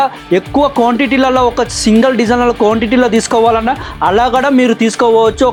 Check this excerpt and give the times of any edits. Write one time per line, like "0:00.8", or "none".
none